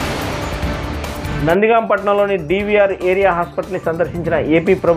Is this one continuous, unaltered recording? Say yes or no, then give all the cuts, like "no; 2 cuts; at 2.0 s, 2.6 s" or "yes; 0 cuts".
yes; 0 cuts